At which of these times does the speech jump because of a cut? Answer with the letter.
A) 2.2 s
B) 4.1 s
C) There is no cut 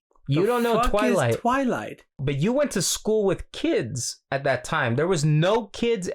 A